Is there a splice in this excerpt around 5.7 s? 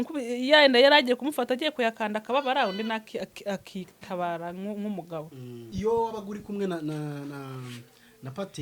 yes; 1 cut; at 5.7 s

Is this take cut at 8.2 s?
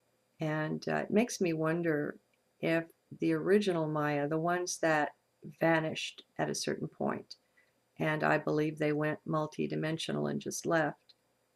no; 0 cuts

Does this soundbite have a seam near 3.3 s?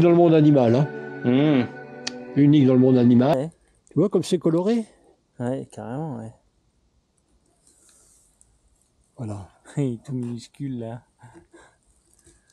yes; 1 cut; at 3.3 s

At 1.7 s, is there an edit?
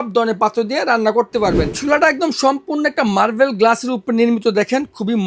yes; 1 cut; at 1.7 s

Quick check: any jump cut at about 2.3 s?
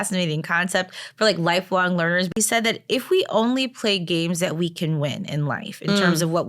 yes; 1 cut; at 2.3 s

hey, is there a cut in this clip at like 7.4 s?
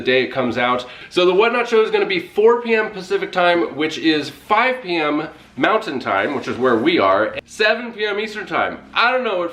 yes; 2 cuts; at 1.0 s, 7.4 s

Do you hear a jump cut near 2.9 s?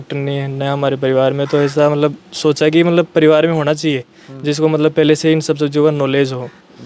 no; 0 cuts

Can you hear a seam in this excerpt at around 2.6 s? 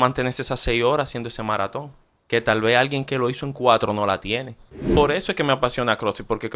no; 1 cut; at 5.0 s

